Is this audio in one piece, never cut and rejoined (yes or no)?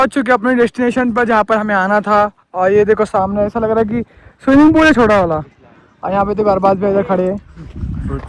yes